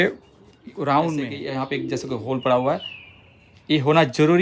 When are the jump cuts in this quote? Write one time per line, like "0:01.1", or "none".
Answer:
0:01.4

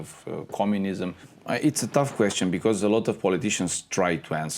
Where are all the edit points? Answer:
0:01.3

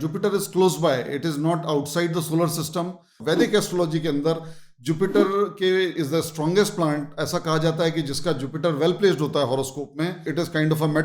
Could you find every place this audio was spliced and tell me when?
0:03.2

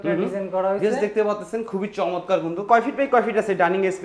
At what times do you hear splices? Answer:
0:02.6

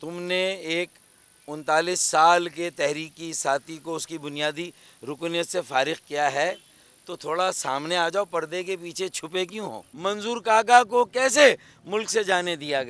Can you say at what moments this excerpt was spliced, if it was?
0:09.8

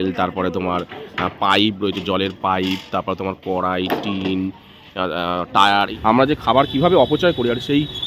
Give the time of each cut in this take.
0:05.9

